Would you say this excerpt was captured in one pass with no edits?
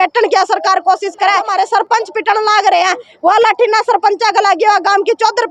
no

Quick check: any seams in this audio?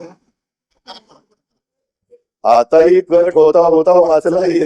no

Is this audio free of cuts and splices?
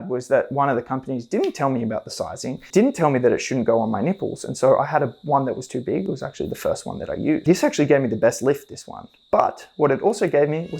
no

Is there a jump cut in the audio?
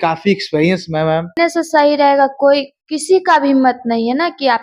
yes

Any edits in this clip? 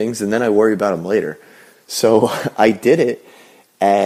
no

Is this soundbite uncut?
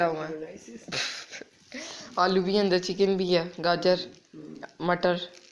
yes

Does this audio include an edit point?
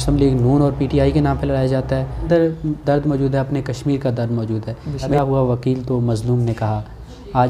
yes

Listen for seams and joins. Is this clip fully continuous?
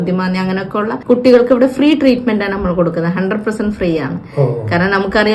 yes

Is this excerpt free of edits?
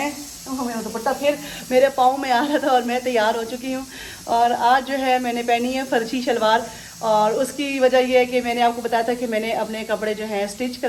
yes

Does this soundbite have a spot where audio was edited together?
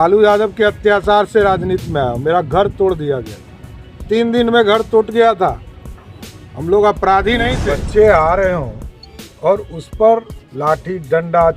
yes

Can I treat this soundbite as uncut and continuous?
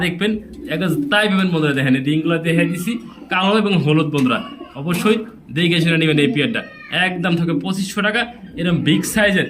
yes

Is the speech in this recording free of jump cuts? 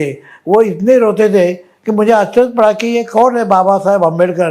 yes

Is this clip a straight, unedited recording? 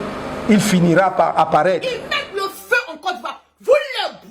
no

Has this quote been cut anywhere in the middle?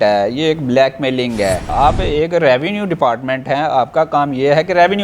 yes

